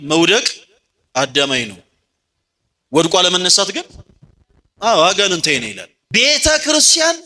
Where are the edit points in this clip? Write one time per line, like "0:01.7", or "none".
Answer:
0:05.9